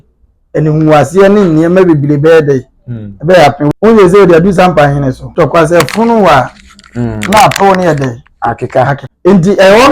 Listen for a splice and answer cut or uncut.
cut